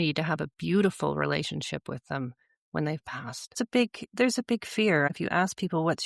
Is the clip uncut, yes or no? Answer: no